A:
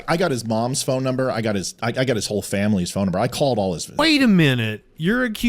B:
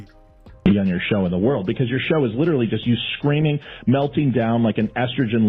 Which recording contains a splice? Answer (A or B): A